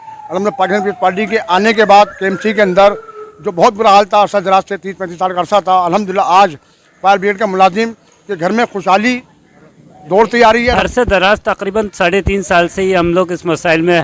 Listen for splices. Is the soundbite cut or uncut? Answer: cut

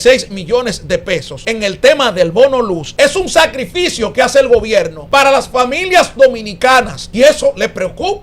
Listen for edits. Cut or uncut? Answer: cut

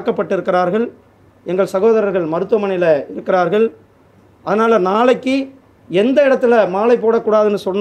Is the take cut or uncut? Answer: uncut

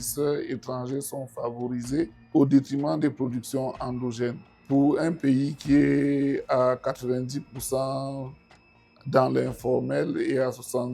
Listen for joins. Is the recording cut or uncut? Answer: cut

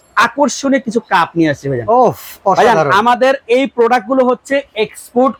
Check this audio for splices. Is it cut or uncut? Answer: uncut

